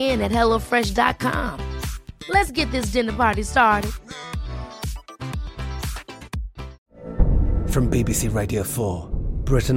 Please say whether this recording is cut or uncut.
cut